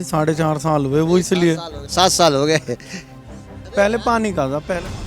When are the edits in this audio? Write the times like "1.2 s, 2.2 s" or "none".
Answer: 1.8 s